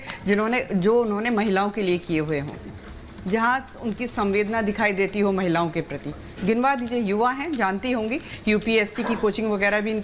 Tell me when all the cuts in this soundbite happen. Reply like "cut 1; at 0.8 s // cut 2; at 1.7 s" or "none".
cut 1; at 3.1 s

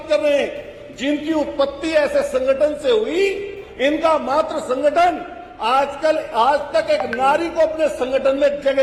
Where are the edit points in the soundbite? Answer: none

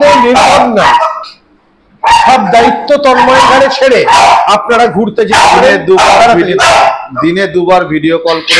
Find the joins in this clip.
none

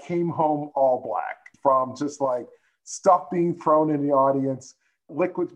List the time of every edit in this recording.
cut 1; at 1.5 s

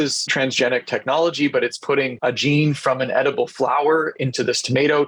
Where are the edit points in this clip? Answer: none

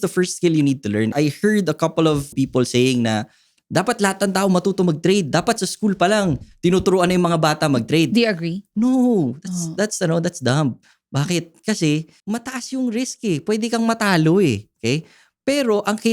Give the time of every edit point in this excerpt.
cut 1; at 1.1 s // cut 2; at 2.3 s

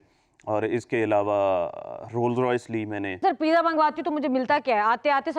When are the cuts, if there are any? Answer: cut 1; at 3.2 s

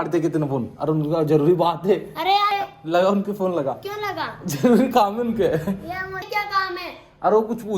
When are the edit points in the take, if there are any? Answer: cut 1; at 2.5 s // cut 2; at 6.3 s

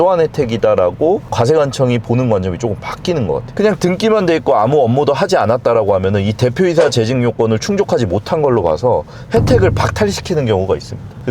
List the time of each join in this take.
cut 1; at 3.5 s

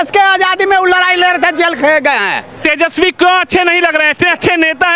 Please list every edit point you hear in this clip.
cut 1; at 2.6 s

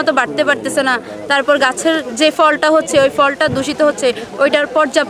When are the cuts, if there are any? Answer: none

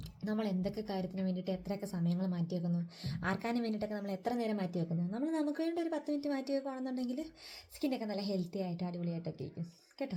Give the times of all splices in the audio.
none

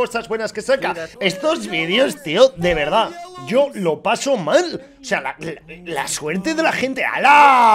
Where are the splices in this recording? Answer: cut 1; at 1.1 s

